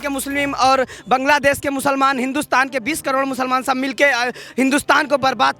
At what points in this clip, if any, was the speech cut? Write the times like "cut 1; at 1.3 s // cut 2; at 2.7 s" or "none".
none